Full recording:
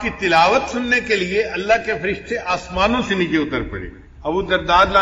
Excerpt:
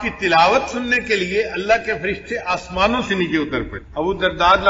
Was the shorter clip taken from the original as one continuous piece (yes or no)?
no